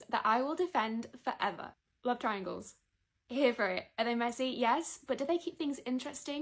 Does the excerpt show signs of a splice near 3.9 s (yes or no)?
no